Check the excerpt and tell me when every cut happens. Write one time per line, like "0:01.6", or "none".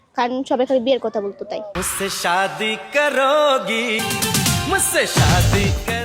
0:04.0